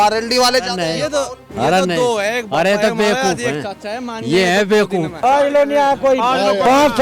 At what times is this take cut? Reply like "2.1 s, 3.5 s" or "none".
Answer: 5.2 s